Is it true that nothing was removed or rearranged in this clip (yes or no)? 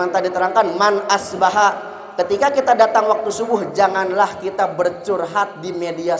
yes